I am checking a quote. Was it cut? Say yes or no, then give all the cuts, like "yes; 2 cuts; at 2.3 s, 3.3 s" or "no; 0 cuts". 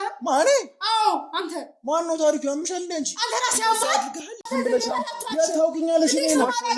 yes; 1 cut; at 4.4 s